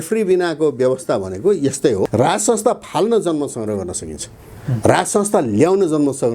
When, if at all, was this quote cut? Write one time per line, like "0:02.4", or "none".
0:02.1